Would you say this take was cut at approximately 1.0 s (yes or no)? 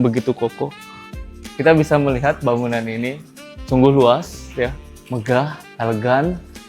yes